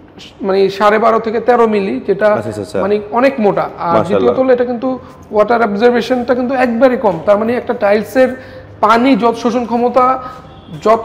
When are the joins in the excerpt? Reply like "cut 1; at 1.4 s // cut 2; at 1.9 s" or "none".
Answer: none